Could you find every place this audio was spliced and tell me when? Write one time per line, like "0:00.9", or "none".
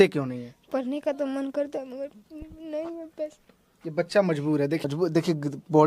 0:04.8

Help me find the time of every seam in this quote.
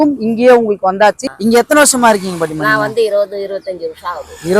0:01.3

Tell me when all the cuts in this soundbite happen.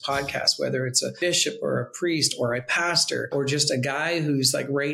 0:01.2
0:03.3

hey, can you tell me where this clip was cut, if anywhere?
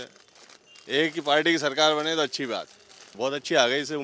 0:03.1

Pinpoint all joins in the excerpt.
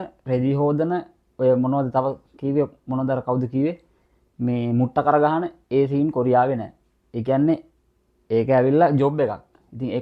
none

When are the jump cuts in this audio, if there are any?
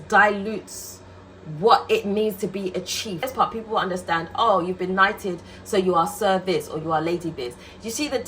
0:03.3

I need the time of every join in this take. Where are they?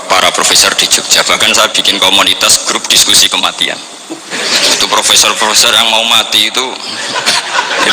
none

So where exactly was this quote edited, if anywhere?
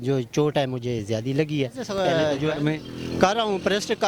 0:01.8

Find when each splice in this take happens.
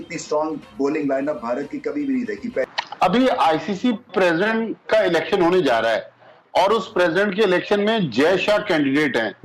0:02.6

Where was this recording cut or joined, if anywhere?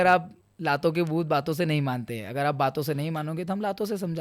none

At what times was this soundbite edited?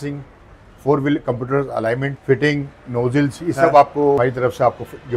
0:02.1
0:04.2

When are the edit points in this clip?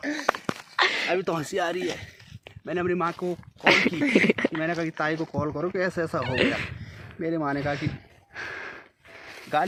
none

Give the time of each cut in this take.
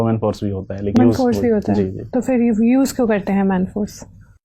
0:00.9

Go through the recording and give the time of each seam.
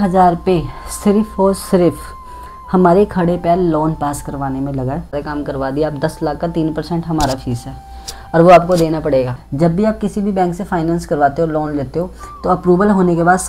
0:05.1
0:09.4

